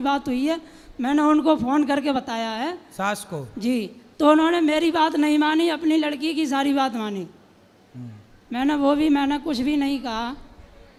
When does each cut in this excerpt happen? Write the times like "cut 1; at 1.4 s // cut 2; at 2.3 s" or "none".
none